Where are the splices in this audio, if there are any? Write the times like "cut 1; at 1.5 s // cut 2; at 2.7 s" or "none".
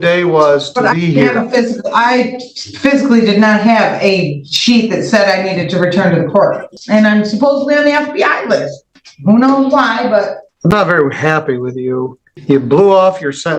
cut 1; at 6.7 s // cut 2; at 10.4 s // cut 3; at 12.2 s

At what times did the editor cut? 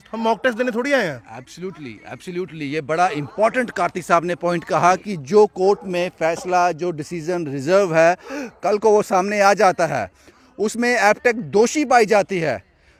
none

